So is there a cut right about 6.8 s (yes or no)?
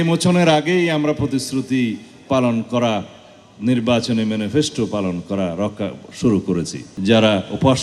yes